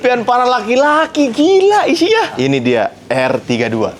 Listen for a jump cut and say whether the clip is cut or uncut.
cut